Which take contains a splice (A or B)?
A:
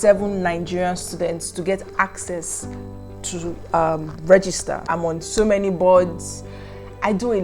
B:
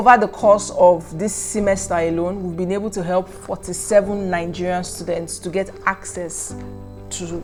A